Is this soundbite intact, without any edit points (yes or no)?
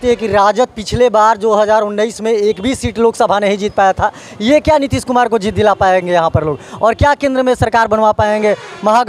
yes